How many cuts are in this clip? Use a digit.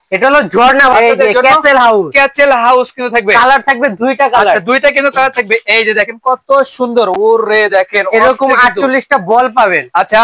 1